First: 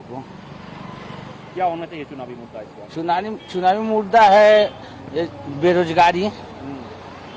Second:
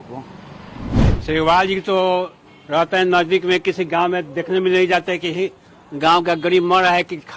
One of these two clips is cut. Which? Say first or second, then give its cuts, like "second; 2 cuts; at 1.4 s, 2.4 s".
second; 1 cut; at 1.1 s